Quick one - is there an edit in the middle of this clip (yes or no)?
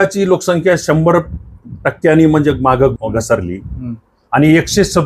yes